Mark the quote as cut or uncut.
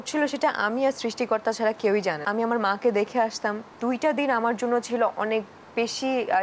cut